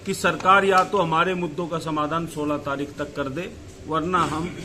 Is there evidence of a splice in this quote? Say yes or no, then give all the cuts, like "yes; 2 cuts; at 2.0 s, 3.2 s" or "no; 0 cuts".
no; 0 cuts